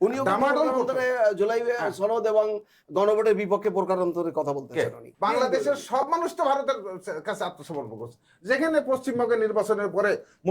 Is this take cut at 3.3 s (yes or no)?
no